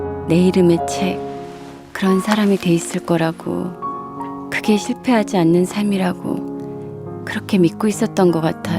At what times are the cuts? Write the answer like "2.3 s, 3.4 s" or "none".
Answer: 3.9 s, 6.7 s